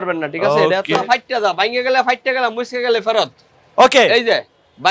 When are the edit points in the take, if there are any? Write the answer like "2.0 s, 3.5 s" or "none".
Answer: 1.0 s

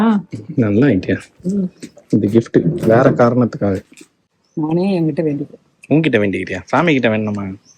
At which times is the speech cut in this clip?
4.4 s

